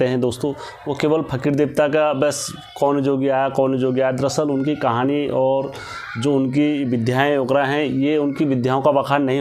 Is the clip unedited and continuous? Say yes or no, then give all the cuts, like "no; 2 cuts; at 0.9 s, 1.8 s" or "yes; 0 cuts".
yes; 0 cuts